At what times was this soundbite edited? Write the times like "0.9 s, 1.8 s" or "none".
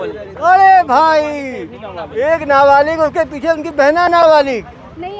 none